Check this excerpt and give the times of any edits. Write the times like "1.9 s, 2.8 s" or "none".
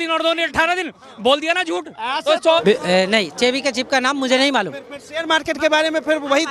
2.4 s